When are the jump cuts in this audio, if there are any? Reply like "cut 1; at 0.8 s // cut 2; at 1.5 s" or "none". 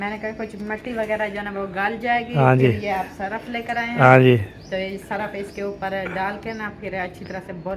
none